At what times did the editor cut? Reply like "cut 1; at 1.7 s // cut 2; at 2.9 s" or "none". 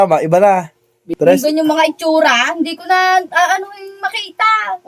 cut 1; at 1.1 s